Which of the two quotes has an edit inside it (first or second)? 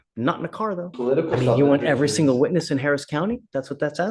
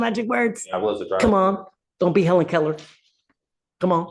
first